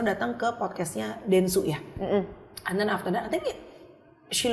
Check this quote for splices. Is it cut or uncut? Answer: uncut